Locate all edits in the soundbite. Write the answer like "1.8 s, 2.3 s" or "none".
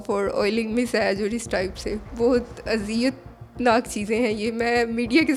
none